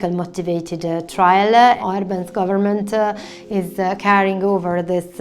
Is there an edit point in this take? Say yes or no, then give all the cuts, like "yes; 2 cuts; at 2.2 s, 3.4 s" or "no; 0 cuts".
yes; 1 cut; at 1.8 s